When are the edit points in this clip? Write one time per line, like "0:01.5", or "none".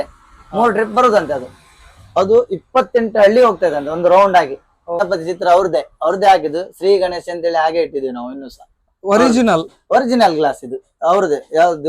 0:05.0